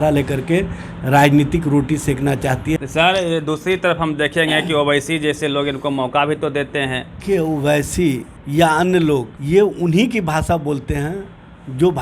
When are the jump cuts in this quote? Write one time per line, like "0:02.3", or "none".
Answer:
0:02.8
0:07.1
0:08.3
0:09.3